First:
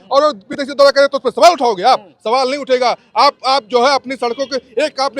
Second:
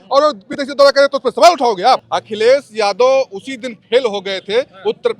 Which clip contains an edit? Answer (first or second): second